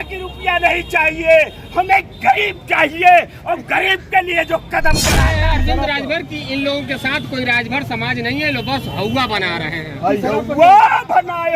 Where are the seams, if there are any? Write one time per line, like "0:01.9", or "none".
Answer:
0:05.3